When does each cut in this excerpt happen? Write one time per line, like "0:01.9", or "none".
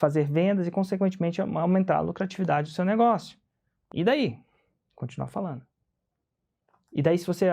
0:03.8